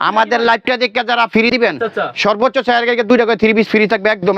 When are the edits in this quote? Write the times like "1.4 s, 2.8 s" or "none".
1.5 s